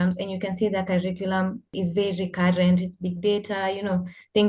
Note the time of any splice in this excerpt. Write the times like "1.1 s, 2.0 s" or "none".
1.7 s